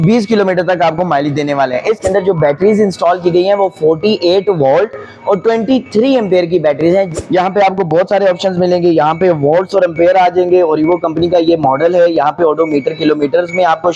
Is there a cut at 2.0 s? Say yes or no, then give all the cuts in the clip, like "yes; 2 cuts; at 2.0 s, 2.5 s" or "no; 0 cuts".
yes; 2 cuts; at 2.0 s, 7.1 s